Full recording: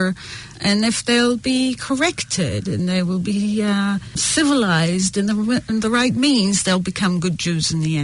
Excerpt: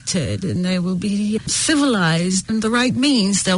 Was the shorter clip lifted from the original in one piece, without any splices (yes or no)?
no